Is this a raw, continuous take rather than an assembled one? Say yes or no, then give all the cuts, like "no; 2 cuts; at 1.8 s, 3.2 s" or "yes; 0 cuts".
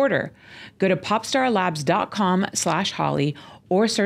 yes; 0 cuts